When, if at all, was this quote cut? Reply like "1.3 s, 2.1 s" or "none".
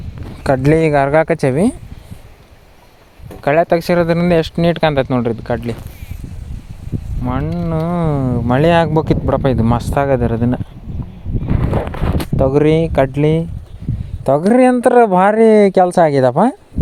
none